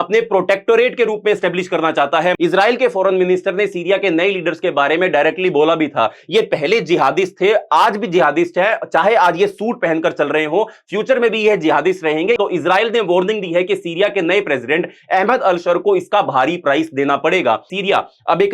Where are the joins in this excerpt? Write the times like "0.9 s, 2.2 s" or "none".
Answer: 2.4 s, 12.4 s, 17.7 s